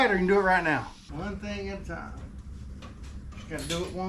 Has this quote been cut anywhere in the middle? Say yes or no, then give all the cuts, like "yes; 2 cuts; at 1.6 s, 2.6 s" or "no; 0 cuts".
yes; 1 cut; at 1.0 s